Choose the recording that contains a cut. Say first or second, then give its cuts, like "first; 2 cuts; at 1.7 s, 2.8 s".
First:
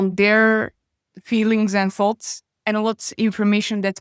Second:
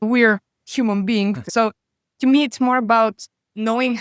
second; 1 cut; at 1.4 s